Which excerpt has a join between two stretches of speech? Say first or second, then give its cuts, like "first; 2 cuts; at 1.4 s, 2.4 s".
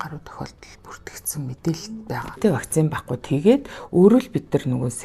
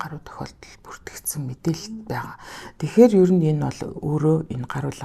first; 1 cut; at 2.4 s